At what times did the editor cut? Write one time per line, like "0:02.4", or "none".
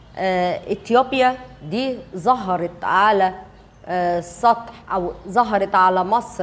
none